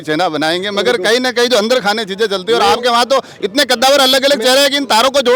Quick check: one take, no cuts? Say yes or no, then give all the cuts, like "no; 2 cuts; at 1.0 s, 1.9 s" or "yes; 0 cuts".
yes; 0 cuts